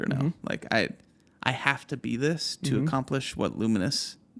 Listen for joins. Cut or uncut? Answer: uncut